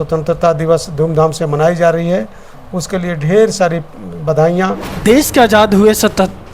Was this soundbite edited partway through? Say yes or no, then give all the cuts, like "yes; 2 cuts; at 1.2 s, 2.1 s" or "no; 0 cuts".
yes; 1 cut; at 4.9 s